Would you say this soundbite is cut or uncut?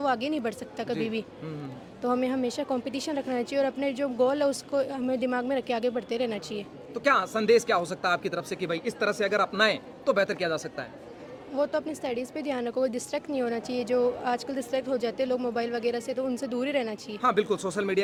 uncut